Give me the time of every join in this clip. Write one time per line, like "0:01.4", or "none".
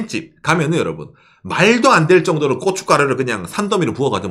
none

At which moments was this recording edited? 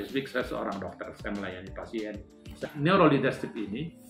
0:02.7

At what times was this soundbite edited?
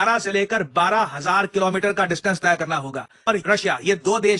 0:03.3

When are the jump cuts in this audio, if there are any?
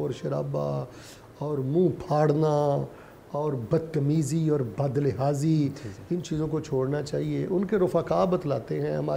none

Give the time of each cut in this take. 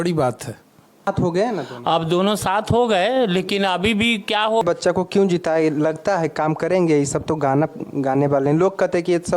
0:01.1
0:04.6

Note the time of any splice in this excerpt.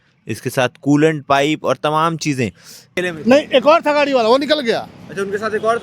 0:02.9

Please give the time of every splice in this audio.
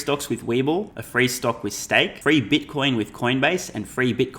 0:01.0
0:02.1

